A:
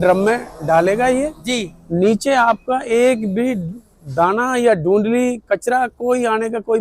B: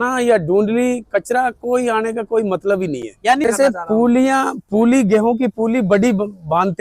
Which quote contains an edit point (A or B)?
B